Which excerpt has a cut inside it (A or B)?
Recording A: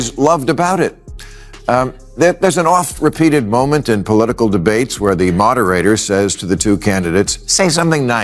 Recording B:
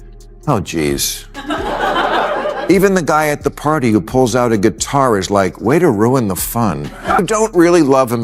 B